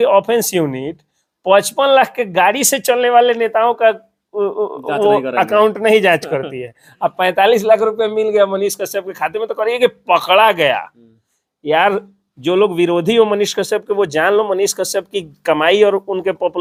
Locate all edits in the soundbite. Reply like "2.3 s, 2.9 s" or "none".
none

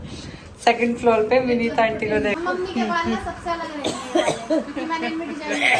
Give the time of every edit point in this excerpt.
2.3 s

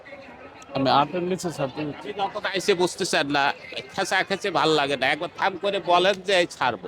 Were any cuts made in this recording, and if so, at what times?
none

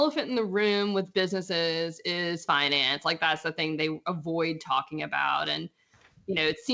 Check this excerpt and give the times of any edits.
none

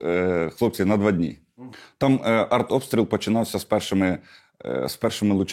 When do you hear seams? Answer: 1.4 s

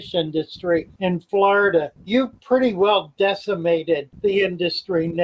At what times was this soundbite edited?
0.9 s, 2.0 s, 4.1 s

